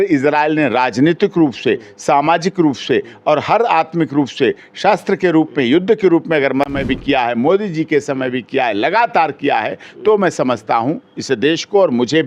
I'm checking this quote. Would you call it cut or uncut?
uncut